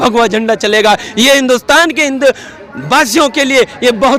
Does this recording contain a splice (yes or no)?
no